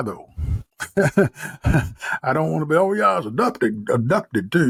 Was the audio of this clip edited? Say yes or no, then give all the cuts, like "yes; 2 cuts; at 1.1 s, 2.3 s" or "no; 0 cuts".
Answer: no; 0 cuts